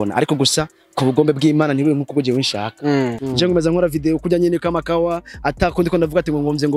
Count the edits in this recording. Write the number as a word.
one